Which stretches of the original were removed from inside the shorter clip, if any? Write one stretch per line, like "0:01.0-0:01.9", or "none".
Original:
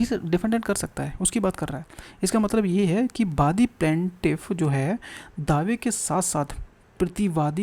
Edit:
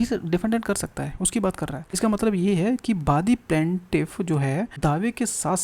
0:01.9-0:02.2
0:05.0-0:05.4